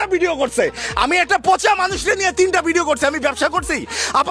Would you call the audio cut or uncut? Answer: uncut